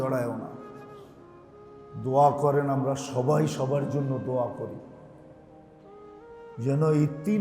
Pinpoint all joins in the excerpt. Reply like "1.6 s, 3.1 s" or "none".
5.1 s, 6.6 s